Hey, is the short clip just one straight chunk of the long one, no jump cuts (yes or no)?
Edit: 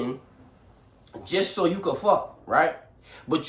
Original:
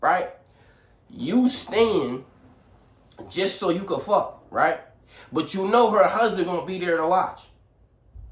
yes